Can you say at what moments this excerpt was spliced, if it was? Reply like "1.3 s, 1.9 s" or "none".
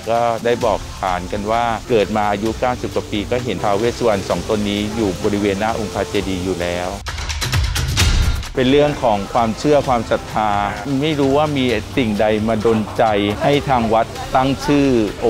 none